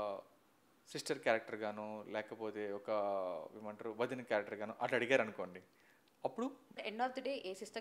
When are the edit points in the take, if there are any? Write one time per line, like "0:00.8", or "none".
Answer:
0:06.8

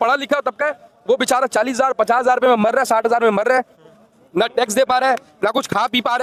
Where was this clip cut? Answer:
none

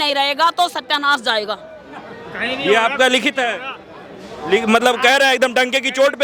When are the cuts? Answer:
none

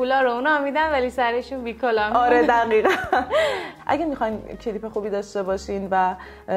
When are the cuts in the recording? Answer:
0:03.7

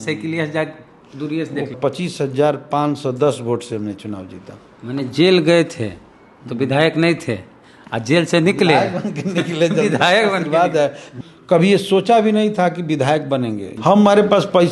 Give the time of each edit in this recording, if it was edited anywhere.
0:01.7
0:11.1
0:13.7

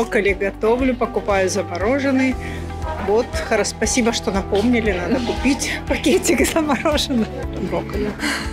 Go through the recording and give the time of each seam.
none

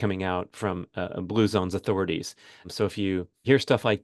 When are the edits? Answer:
0:02.9

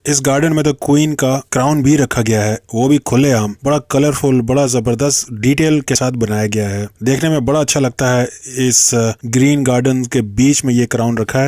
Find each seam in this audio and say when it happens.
none

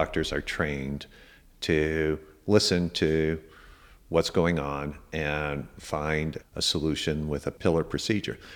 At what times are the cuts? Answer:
0:06.4
0:07.6

